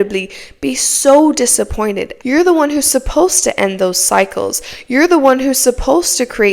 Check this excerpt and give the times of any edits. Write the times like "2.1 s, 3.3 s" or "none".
2.1 s